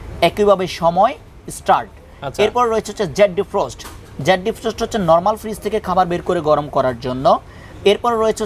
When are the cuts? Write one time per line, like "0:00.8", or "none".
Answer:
none